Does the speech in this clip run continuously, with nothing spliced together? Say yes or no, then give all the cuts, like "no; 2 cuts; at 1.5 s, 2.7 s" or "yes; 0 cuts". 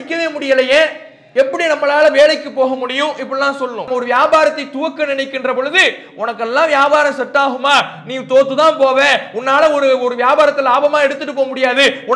yes; 0 cuts